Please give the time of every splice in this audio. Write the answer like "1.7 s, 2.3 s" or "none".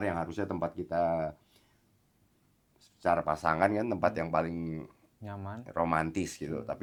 none

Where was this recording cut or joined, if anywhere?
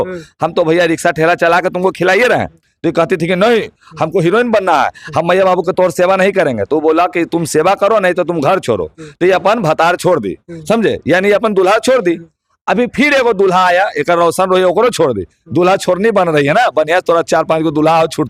none

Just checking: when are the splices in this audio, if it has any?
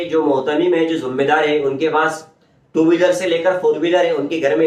none

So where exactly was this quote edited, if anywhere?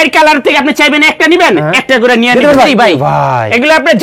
2.7 s

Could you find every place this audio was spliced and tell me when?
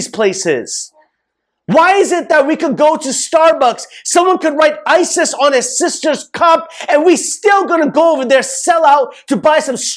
none

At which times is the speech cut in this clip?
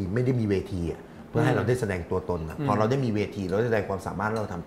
none

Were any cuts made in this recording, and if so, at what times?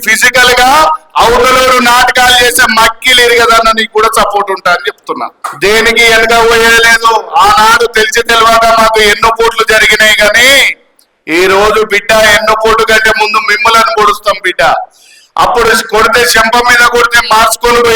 5.4 s

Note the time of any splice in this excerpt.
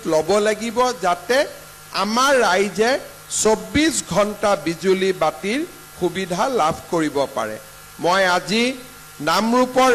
none

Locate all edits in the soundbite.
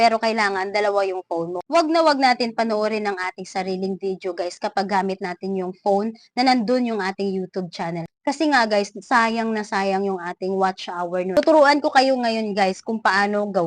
1.6 s, 11.4 s

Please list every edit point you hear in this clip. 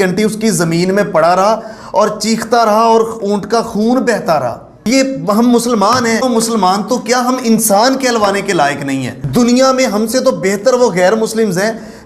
4.7 s, 6.2 s, 9.2 s

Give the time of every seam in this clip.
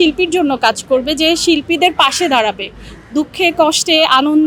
none

